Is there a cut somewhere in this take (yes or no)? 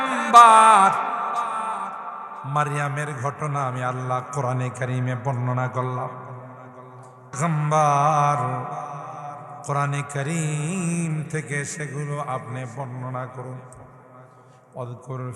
yes